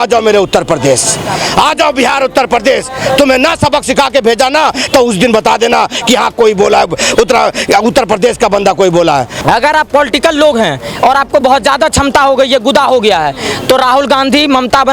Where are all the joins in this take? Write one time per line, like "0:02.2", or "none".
0:09.3